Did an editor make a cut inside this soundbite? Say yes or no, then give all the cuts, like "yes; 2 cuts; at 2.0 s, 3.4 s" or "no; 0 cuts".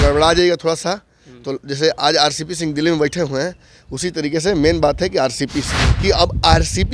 yes; 1 cut; at 5.8 s